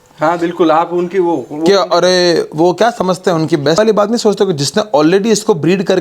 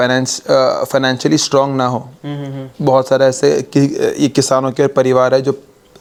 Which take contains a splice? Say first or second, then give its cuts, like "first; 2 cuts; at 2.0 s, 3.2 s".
first; 1 cut; at 3.8 s